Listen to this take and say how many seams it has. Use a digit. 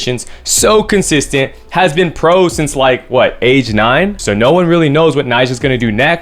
1